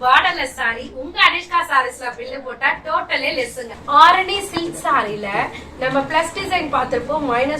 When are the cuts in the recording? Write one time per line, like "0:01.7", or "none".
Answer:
0:03.8

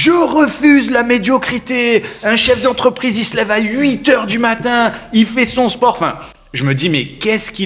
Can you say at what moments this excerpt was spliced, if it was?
none

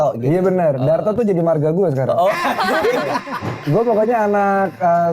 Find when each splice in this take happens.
0:03.5

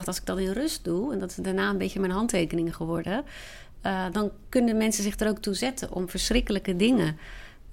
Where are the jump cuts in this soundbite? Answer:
none

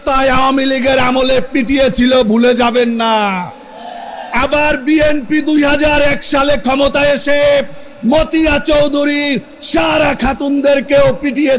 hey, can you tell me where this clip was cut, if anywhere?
none

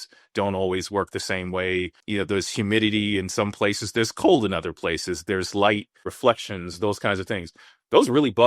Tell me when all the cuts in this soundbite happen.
0:02.0

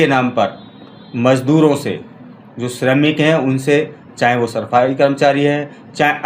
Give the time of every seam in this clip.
none

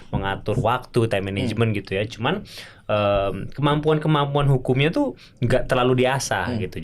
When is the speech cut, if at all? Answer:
none

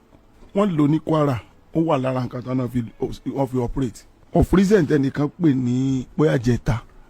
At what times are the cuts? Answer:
0:04.1

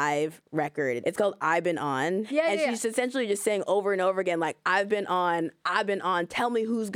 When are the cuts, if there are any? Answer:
0:01.0
0:02.3

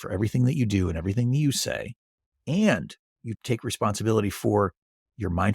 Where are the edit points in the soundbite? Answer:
0:03.3

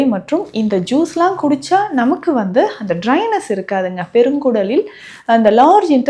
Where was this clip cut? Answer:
none

